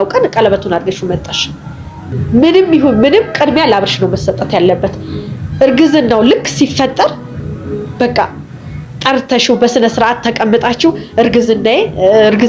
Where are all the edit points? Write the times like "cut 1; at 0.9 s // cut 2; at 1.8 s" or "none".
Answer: cut 1; at 2.2 s